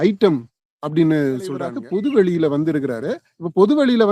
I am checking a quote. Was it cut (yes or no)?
yes